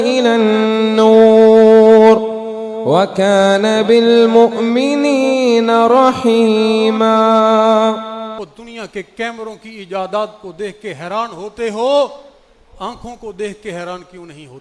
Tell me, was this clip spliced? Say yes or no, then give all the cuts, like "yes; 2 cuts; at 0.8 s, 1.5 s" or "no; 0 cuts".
yes; 1 cut; at 8.4 s